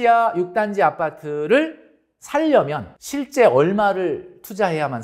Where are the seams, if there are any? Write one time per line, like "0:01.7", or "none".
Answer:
0:02.9